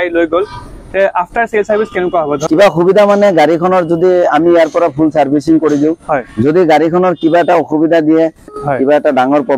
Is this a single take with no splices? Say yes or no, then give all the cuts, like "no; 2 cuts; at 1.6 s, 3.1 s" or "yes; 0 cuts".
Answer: no; 2 cuts; at 2.4 s, 8.6 s